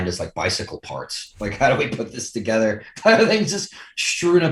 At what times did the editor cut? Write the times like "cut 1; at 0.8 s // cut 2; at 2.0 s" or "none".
none